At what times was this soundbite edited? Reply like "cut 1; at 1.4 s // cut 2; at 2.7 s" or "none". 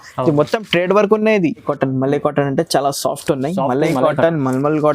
cut 1; at 1.7 s